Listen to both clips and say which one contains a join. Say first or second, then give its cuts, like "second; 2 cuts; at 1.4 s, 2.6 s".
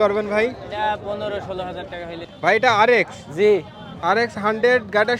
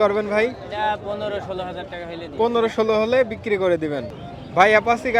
first; 1 cut; at 2.2 s